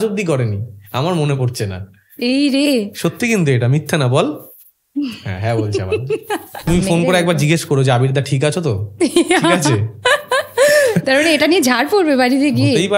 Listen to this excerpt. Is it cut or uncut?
cut